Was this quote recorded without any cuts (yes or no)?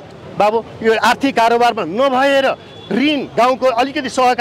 yes